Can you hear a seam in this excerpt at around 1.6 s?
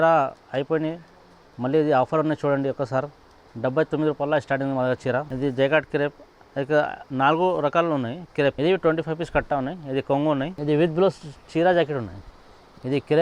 no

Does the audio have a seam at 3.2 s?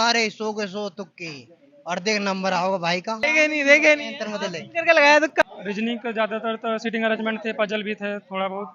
yes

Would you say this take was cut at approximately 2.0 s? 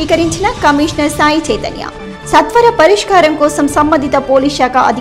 no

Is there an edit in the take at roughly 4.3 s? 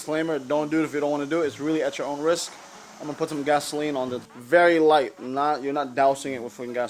yes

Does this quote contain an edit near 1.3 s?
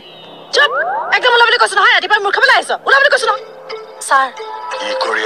no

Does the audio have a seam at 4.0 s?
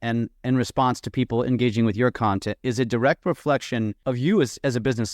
yes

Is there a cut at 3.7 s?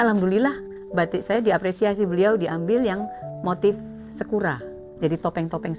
no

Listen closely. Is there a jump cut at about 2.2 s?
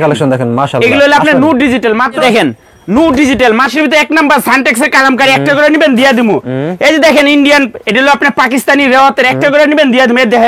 yes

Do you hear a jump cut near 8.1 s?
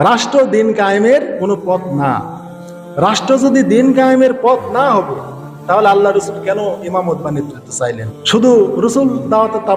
yes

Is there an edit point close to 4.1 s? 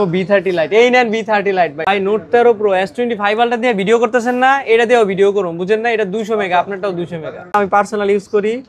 no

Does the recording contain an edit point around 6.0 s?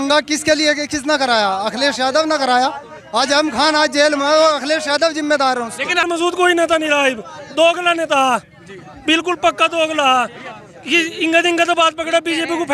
yes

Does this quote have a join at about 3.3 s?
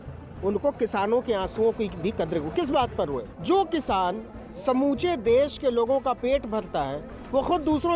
yes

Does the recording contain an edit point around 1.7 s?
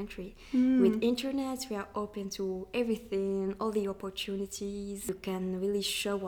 no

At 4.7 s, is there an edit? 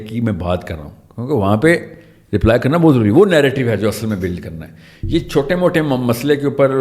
no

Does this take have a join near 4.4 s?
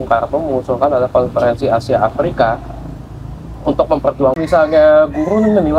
yes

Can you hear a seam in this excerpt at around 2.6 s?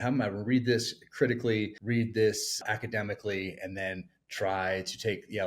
yes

